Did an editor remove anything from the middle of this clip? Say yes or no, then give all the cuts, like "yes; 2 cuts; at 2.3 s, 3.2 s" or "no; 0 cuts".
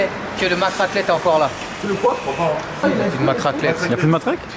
no; 0 cuts